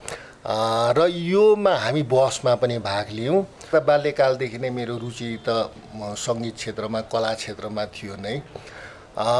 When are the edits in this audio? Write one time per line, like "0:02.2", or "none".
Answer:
0:03.7